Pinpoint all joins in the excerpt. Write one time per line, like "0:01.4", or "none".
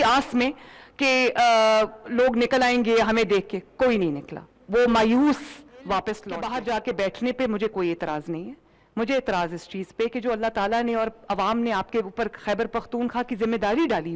0:06.3